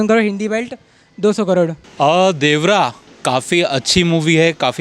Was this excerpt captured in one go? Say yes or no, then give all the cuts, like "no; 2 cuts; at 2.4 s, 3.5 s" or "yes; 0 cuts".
no; 1 cut; at 1.8 s